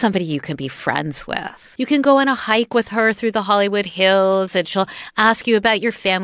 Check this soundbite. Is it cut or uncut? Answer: cut